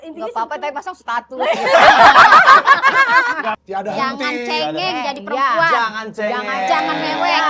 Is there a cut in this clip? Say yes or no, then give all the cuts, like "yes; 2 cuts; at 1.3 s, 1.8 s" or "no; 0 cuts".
yes; 1 cut; at 3.3 s